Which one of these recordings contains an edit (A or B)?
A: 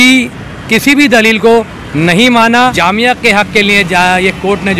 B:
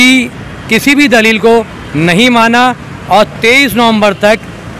A